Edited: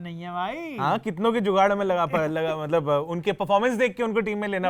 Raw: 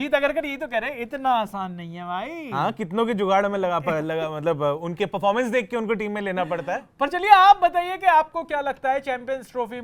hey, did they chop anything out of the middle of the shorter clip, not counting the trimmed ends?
no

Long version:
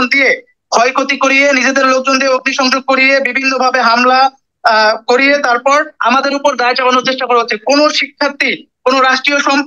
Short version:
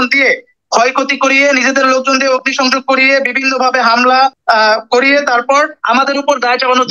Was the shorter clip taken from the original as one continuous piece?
no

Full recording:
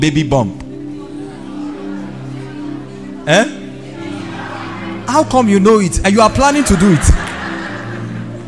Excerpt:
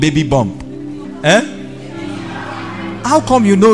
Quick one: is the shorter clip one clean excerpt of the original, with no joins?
no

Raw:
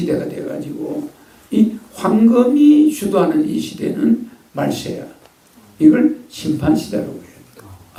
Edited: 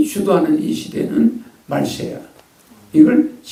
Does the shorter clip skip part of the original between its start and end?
no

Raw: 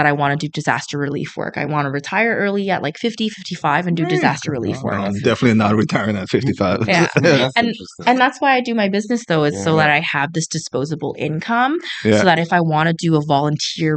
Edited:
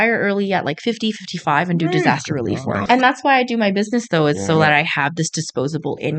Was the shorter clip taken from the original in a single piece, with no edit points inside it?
no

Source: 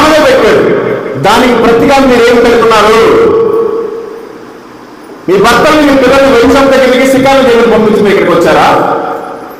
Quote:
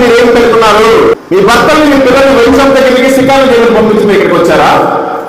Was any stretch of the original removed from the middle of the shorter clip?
yes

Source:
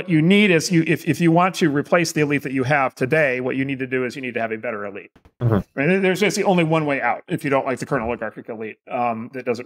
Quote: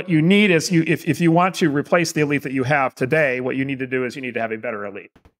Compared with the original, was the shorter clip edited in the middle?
no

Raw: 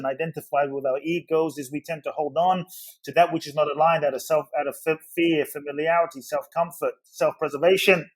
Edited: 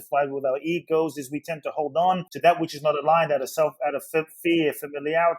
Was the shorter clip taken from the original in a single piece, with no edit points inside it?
no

